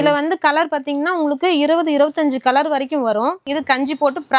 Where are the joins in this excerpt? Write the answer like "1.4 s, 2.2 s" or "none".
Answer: 3.4 s